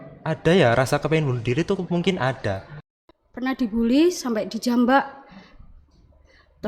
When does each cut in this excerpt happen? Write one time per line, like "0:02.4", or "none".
0:03.0